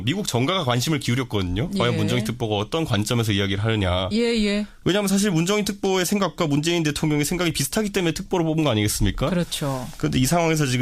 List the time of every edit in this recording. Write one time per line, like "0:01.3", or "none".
0:02.4